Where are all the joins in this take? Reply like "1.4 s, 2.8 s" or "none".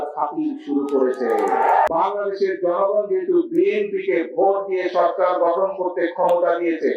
1.9 s